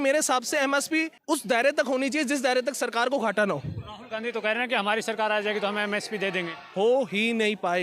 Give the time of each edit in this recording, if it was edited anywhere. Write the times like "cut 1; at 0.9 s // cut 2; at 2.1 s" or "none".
cut 1; at 1.1 s